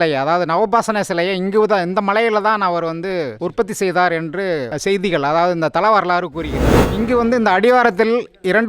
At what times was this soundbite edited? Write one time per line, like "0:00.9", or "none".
0:06.9